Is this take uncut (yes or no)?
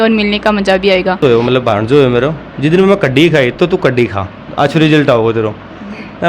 no